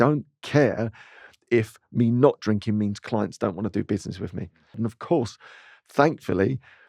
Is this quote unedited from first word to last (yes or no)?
no